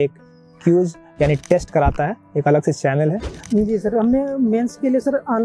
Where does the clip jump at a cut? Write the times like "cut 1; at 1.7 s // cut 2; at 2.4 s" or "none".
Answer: cut 1; at 3.3 s